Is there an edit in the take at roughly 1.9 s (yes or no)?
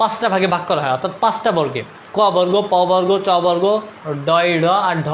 no